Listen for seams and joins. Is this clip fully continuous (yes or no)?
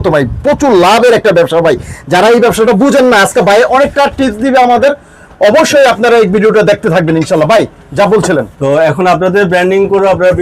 yes